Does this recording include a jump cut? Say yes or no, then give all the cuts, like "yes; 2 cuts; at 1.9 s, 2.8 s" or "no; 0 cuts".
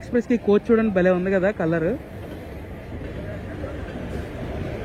no; 0 cuts